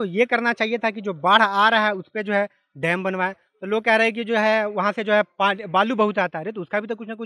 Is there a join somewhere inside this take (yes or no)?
no